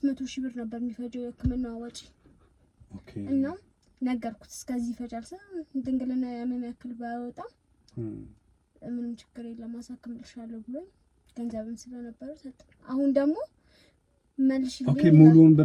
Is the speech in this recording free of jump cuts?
yes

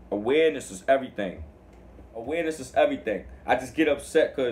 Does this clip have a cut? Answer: yes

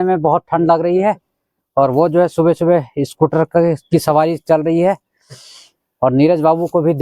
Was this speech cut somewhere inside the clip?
no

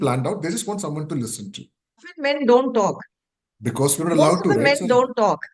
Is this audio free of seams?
no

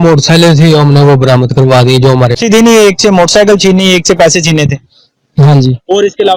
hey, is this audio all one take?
no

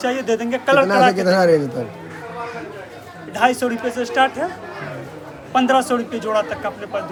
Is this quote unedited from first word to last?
yes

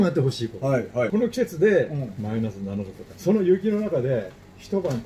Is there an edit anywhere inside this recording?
yes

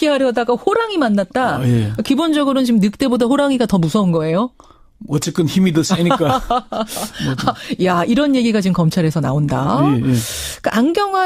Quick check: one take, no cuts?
no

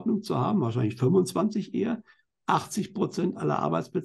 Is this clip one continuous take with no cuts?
yes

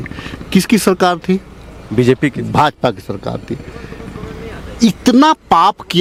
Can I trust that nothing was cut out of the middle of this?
yes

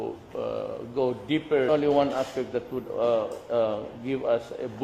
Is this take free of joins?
yes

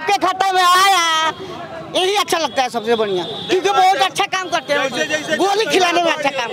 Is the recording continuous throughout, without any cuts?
yes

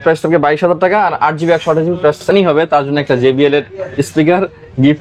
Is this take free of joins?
no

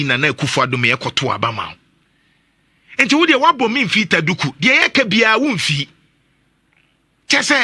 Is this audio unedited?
yes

